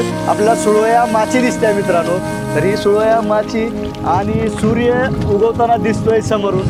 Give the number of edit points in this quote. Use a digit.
0